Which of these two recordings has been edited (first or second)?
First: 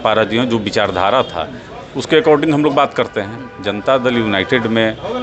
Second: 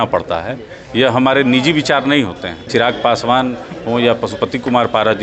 second